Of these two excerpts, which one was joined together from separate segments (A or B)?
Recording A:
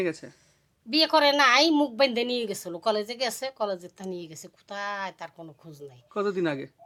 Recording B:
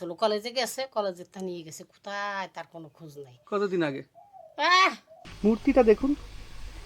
B